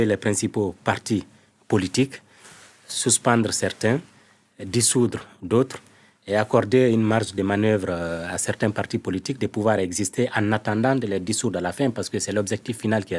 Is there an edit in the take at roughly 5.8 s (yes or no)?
no